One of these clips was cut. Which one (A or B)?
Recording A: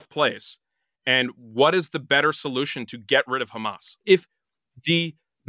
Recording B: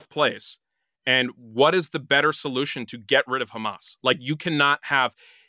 A